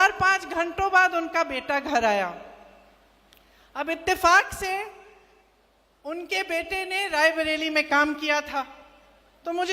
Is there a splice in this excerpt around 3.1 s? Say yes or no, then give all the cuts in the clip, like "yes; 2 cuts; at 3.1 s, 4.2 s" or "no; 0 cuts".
no; 0 cuts